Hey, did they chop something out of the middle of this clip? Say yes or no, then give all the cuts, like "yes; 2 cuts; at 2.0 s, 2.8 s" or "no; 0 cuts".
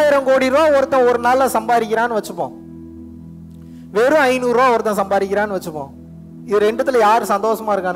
no; 0 cuts